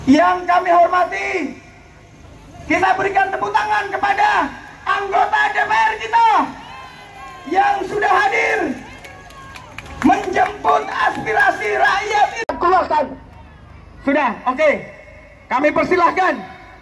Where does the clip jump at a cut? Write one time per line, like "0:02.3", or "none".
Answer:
0:12.5